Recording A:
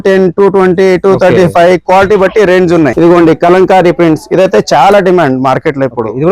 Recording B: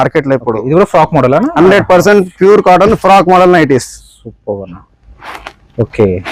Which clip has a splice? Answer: A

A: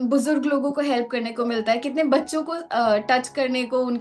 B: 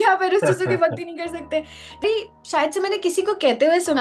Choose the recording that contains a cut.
B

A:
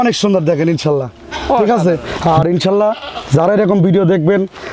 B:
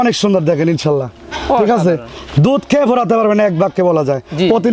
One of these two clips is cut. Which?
A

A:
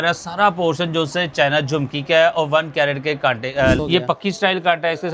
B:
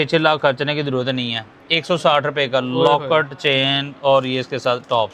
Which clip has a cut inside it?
A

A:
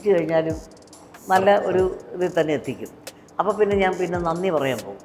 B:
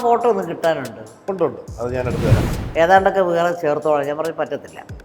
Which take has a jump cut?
B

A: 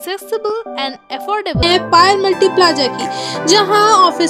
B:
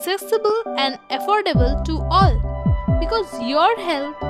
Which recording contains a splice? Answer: A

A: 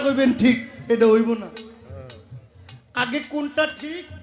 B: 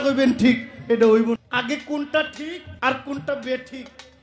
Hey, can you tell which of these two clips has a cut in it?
B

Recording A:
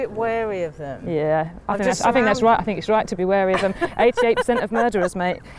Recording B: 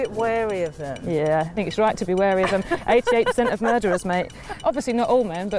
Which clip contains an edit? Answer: B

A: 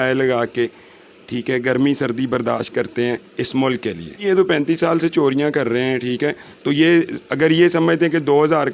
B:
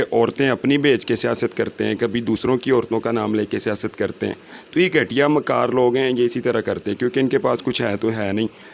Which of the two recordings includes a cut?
A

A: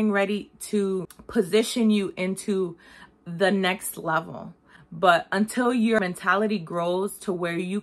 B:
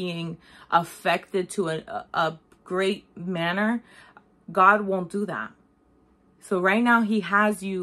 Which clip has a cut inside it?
A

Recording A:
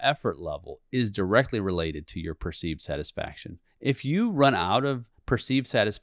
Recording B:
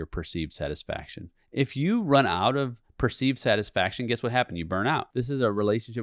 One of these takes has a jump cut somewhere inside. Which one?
B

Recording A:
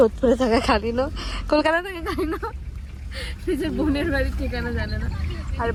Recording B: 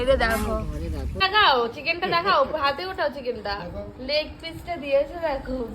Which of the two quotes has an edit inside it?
B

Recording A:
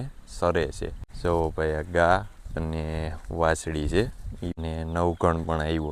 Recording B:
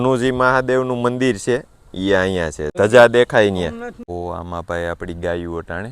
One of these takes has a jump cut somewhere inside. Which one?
B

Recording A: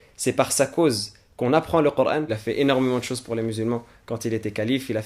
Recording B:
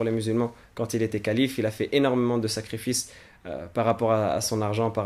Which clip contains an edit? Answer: A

